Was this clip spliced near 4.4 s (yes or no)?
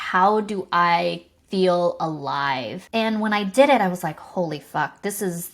no